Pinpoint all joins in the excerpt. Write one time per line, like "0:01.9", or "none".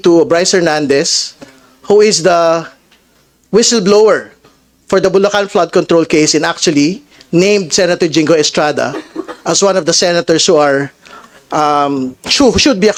none

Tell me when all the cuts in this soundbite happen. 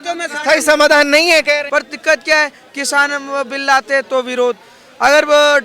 0:01.7

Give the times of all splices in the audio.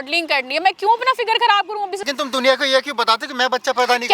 0:02.0

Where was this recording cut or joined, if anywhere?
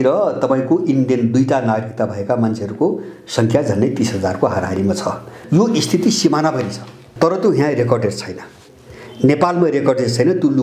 0:05.4
0:07.1

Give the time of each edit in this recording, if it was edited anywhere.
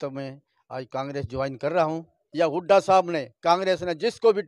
0:02.2

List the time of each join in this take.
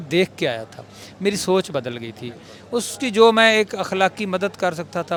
none

